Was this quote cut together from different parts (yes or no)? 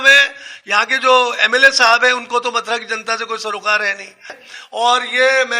yes